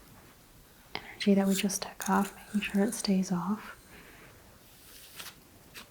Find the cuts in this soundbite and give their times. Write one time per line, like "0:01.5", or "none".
0:04.3